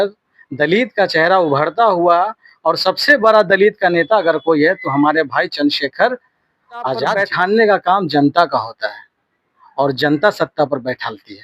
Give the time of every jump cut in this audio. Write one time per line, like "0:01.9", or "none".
0:07.2

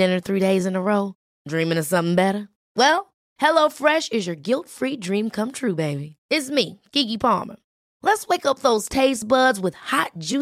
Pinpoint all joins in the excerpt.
none

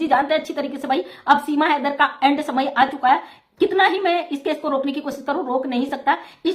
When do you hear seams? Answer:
none

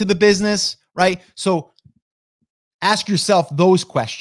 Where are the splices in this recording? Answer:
none

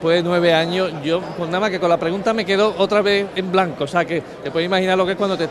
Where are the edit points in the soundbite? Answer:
none

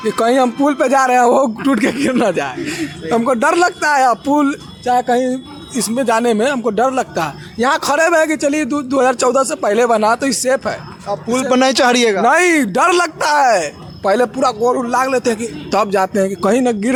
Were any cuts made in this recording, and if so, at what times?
none

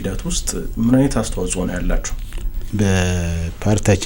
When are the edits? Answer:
none

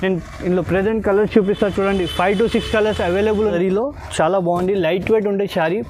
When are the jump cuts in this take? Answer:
0:03.5

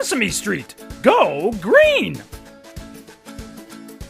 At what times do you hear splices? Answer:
0:02.2

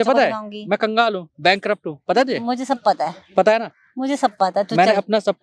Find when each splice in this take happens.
none

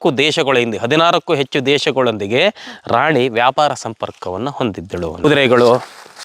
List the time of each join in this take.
0:05.2

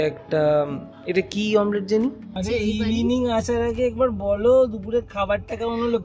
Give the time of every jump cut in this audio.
0:02.4

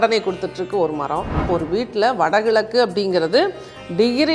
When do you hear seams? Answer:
0:01.5

